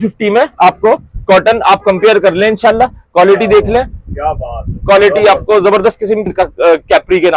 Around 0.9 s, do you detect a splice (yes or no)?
no